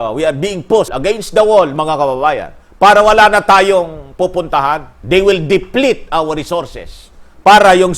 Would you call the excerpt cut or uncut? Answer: cut